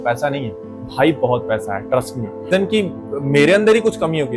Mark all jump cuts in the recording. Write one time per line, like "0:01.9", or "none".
0:02.5